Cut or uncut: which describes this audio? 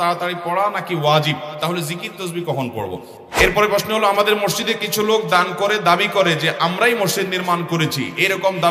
cut